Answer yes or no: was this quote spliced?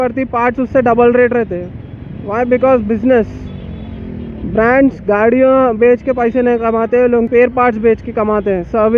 no